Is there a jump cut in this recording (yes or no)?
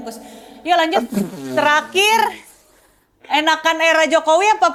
no